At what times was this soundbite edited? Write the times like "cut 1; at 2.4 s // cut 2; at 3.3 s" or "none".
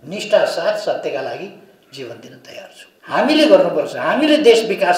cut 1; at 2.9 s